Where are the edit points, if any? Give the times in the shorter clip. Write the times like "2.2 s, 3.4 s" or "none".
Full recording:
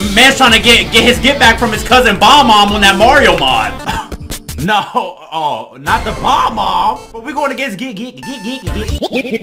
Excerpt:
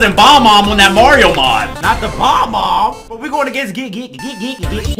1.7 s